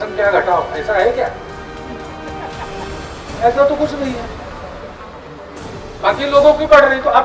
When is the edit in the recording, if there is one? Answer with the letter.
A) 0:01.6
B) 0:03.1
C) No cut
C